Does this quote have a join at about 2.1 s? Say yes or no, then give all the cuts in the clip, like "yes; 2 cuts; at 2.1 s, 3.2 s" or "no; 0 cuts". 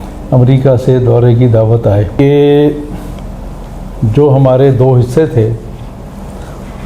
yes; 1 cut; at 2.1 s